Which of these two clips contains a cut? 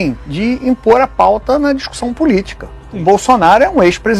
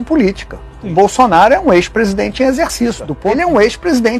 second; 1 cut; at 3.1 s

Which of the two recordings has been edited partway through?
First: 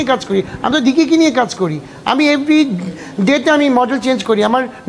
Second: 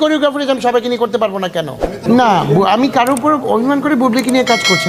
second; 1 cut; at 2.2 s

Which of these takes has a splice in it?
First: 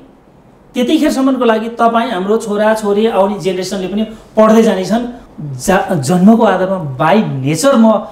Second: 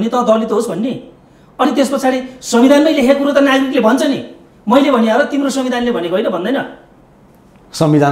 first; 1 cut; at 5.2 s

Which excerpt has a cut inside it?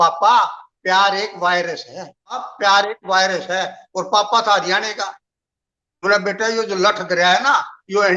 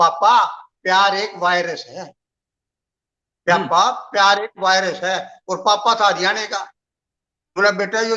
first; 1 cut; at 2.5 s

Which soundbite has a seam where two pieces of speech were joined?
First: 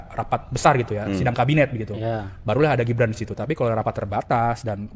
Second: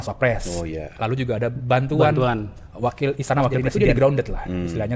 second; 1 cut; at 3.7 s

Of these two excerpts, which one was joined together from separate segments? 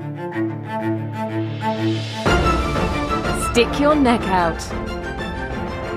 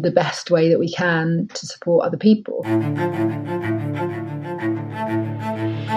second; 1 cut; at 2.6 s

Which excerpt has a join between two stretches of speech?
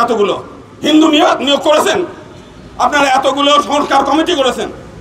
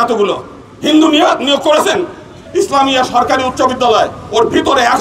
second; 1 cut; at 2.3 s

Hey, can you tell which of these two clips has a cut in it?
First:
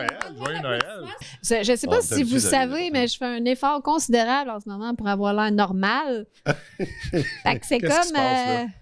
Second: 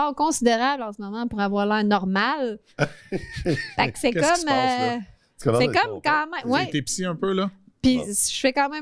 first; 1 cut; at 1.2 s

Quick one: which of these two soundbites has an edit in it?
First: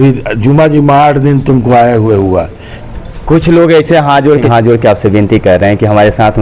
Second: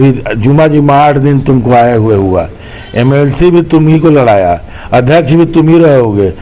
first; 2 cuts; at 2.8 s, 4.5 s

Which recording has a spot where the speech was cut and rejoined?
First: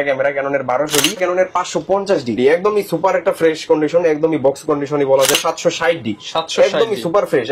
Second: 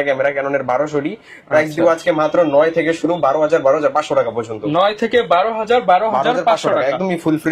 first; 3 cuts; at 1.2 s, 2.4 s, 5.4 s

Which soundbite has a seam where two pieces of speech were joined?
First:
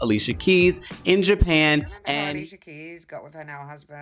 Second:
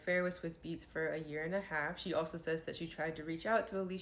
first; 1 cut; at 2.2 s

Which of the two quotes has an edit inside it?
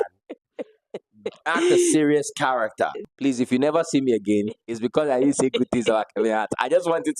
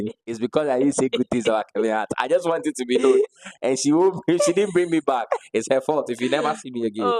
first; 1 cut; at 3.0 s

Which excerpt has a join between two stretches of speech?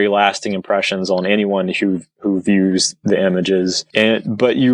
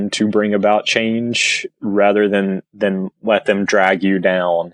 first; 1 cut; at 3.8 s

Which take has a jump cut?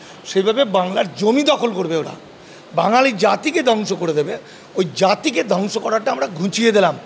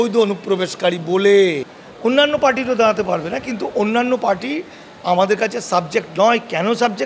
second; 1 cut; at 2.1 s

